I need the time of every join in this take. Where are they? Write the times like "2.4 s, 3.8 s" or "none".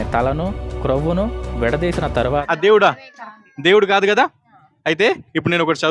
2.4 s

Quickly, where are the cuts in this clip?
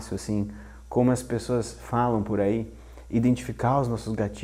none

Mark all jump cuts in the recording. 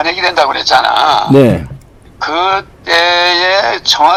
none

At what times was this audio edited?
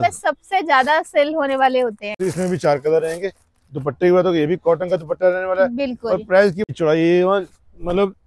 2.2 s, 6.7 s

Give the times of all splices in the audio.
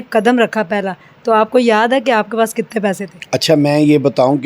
3.1 s

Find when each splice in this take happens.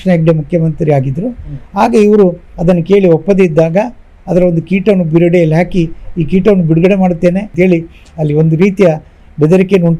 2.5 s, 7.5 s

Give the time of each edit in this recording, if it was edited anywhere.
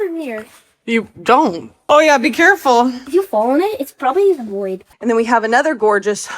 1.9 s, 3.0 s, 4.8 s

